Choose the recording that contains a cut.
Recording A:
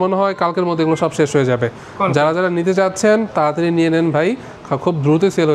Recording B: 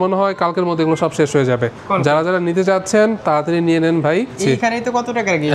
B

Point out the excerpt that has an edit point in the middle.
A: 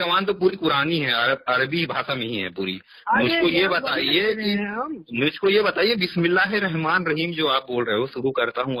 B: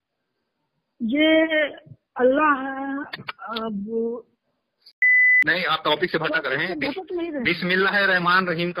B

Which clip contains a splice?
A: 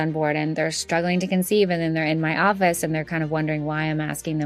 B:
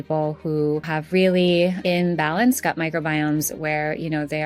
B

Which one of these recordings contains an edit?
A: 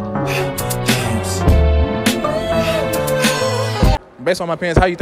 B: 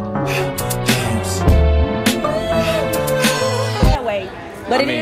A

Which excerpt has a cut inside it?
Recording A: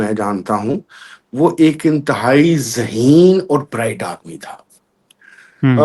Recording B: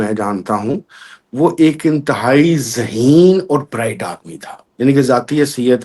B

